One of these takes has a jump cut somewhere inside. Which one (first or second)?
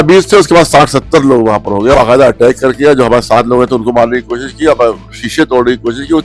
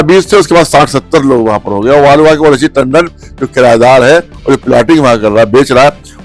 first